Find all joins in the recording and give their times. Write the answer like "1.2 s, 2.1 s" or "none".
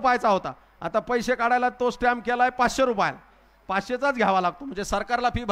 none